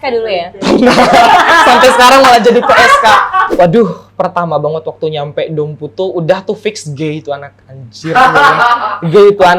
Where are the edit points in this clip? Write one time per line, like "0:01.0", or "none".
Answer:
0:03.4